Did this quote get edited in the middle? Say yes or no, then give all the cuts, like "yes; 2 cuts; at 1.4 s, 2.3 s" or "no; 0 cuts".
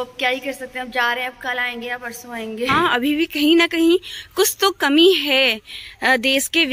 yes; 1 cut; at 2.7 s